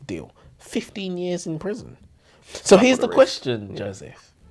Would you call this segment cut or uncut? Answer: cut